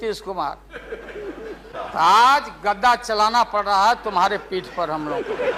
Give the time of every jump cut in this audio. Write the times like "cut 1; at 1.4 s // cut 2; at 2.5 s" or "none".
cut 1; at 1.7 s